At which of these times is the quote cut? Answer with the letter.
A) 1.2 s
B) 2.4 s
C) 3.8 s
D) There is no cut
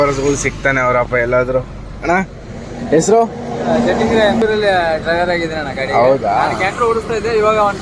D